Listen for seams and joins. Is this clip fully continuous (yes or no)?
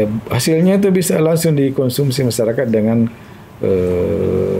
yes